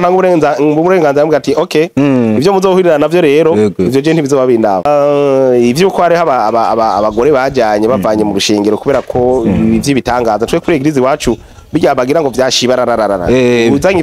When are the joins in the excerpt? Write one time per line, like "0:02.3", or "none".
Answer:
0:04.9

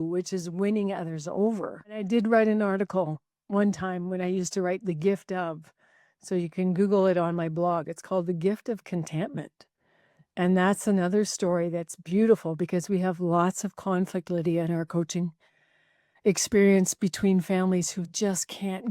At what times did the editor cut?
0:02.1

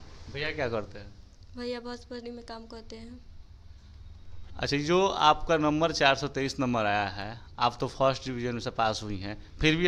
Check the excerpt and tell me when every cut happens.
none

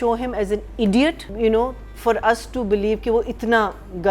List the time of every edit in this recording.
0:01.2

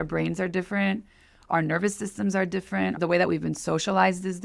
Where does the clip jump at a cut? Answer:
0:01.4
0:03.0

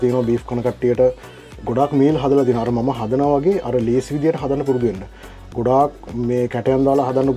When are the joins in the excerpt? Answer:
none

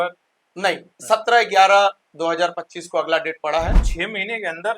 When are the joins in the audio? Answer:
0:03.9

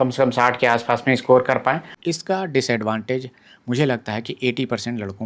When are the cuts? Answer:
0:01.9

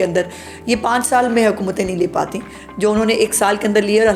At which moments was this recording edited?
none

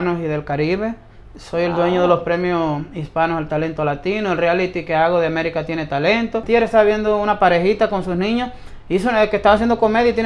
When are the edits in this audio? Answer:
0:06.4

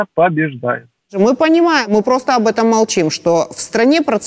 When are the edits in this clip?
0:01.1
0:01.9

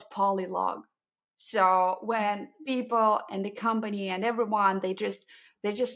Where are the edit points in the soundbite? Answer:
none

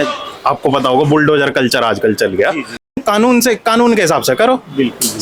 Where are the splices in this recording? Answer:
0:02.9

